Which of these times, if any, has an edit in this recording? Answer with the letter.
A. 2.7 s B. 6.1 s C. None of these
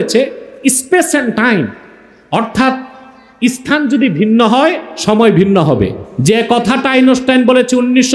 B